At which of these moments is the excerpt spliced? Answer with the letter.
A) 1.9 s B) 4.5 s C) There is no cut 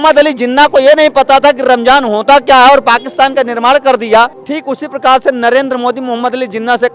B